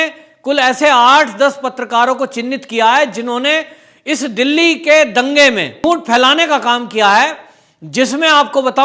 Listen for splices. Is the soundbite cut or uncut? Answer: cut